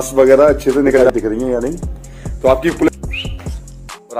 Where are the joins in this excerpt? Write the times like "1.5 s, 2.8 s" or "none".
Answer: 1.0 s, 2.9 s